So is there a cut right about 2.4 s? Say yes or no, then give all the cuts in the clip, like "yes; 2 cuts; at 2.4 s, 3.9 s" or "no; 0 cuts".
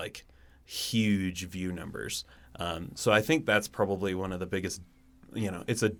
no; 0 cuts